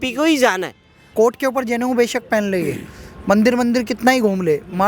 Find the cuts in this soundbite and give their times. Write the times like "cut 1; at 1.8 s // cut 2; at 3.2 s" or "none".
cut 1; at 1.0 s